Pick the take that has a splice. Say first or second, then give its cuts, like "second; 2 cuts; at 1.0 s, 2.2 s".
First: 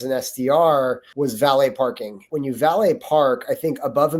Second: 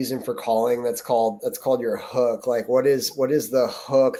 first; 2 cuts; at 1.1 s, 2.1 s